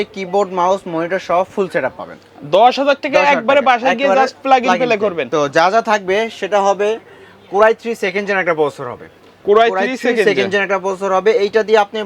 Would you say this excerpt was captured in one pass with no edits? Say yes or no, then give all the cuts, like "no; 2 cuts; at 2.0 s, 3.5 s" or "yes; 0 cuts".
yes; 0 cuts